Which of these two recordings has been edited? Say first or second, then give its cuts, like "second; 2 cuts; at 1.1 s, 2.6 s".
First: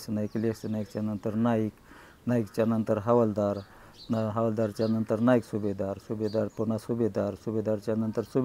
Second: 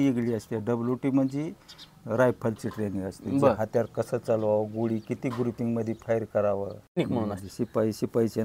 second; 1 cut; at 6.9 s